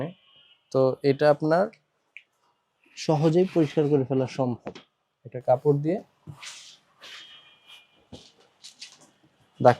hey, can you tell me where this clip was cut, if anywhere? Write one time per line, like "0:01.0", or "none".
none